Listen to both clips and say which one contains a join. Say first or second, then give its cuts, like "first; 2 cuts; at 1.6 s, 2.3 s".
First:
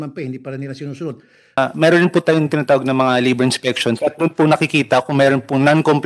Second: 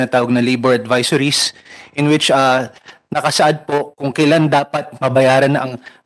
first; 1 cut; at 1.6 s